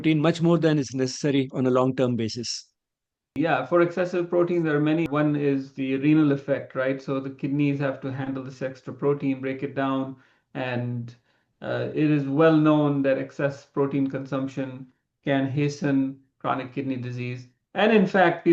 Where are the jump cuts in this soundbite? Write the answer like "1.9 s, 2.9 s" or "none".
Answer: 3.3 s, 5.0 s